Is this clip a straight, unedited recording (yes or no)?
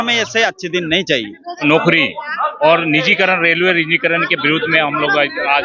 no